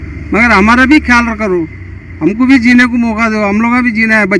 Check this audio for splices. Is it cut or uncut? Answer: uncut